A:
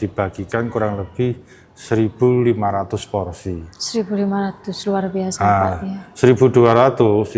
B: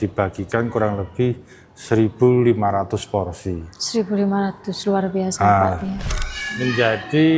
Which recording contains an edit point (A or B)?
B